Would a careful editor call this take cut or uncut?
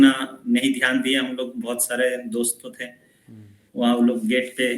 uncut